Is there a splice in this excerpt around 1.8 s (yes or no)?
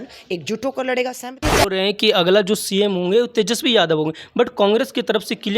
yes